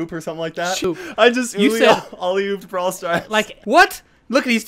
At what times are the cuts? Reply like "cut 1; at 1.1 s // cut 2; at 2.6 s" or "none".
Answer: cut 1; at 0.8 s // cut 2; at 3.6 s